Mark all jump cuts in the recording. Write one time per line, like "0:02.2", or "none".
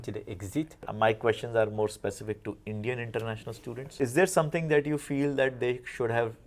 0:00.9
0:03.9